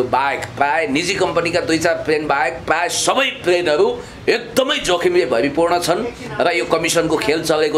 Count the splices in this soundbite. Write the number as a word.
zero